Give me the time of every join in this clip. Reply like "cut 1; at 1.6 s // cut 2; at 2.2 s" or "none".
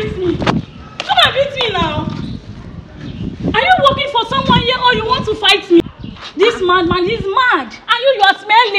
cut 1; at 5.8 s

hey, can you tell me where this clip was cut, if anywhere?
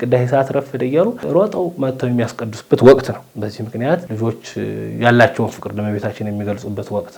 none

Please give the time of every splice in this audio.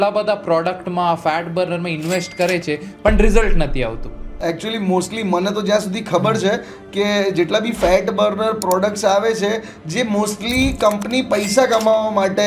none

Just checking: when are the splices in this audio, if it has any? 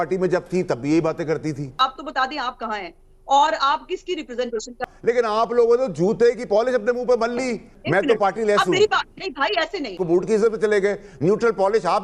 cut 1; at 1.8 s // cut 2; at 4.8 s // cut 3; at 7.7 s // cut 4; at 10.0 s

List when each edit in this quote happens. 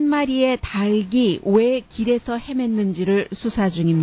cut 1; at 1.3 s

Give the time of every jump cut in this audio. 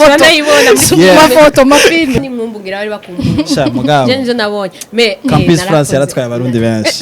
cut 1; at 2.2 s

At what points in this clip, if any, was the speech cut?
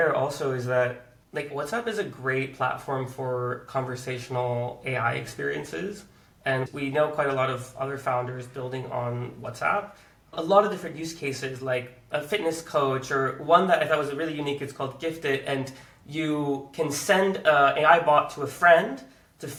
none

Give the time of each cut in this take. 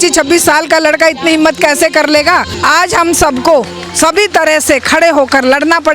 cut 1; at 2.5 s

